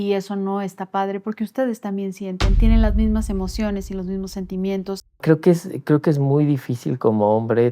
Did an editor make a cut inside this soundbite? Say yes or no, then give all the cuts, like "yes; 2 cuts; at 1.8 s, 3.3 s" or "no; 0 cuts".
yes; 1 cut; at 5.2 s